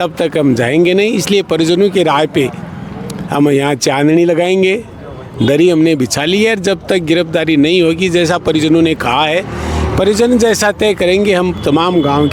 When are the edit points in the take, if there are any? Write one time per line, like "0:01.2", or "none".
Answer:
none